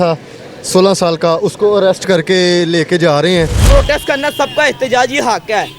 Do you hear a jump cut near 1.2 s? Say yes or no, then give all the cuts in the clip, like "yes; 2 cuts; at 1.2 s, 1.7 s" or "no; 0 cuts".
no; 1 cut; at 3.6 s